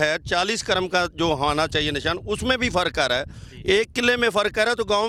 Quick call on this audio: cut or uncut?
uncut